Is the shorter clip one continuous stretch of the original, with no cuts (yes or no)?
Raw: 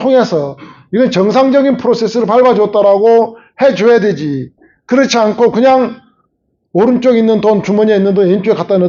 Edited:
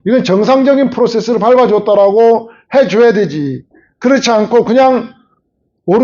yes